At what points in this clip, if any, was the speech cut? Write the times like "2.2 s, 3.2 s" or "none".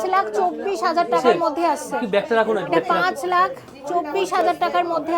none